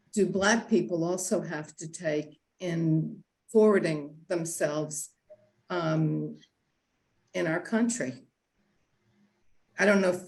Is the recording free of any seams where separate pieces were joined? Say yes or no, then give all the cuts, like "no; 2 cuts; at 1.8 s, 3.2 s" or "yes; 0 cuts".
yes; 0 cuts